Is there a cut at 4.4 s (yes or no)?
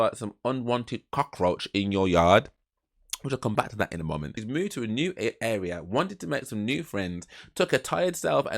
yes